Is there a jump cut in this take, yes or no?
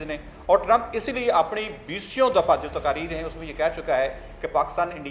no